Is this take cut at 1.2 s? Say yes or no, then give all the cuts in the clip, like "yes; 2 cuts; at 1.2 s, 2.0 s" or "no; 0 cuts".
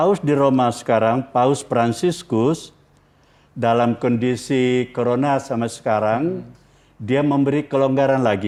no; 0 cuts